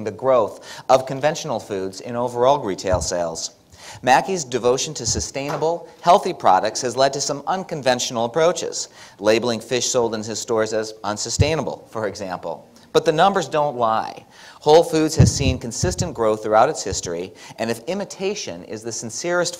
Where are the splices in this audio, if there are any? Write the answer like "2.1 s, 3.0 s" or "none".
12.4 s

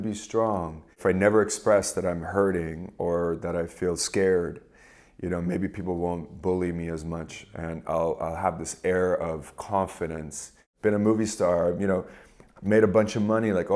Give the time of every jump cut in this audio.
1.0 s, 10.6 s

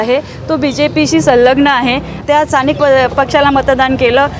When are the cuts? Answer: 2.1 s

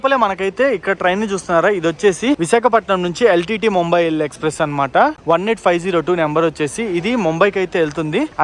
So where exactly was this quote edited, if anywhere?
none

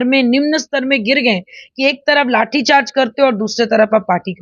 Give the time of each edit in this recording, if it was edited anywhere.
none

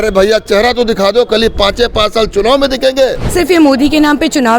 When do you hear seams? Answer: 3.2 s

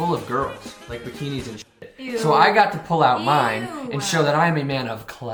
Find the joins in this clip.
none

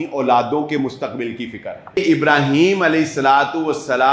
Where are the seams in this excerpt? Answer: 2.0 s

